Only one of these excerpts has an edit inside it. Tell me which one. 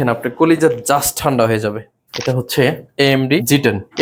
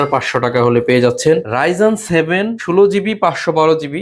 second; 2 cuts; at 1.5 s, 2.6 s

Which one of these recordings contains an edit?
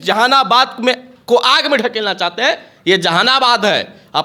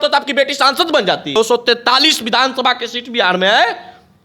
second; 1 cut; at 1.4 s

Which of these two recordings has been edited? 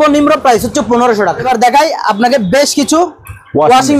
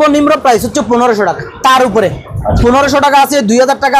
first; 1 cut; at 1.5 s

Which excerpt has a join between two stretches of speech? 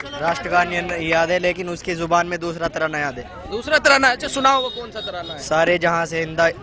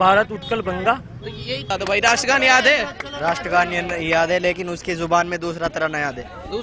second; 1 cut; at 1.7 s

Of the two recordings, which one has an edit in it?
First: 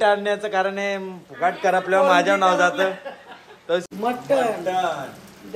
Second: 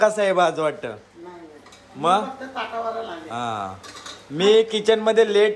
first; 1 cut; at 3.8 s

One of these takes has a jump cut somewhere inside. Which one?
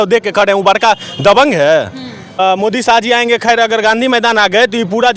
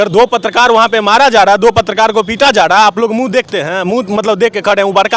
first; 1 cut; at 2.2 s

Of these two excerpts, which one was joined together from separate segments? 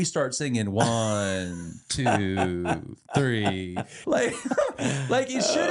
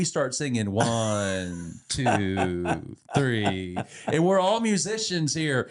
first; 1 cut; at 4.0 s

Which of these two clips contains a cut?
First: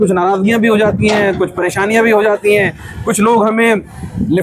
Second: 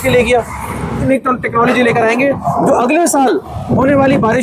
second; 1 cut; at 1.1 s

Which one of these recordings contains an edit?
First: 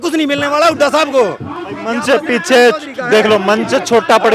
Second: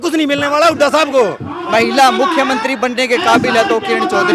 second; 1 cut; at 1.6 s

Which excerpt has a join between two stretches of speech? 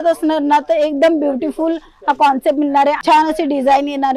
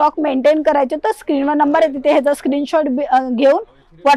first; 1 cut; at 3.0 s

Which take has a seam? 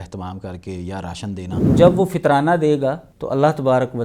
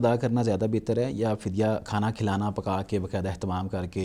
first; 2 cuts; at 1.7 s, 3.1 s

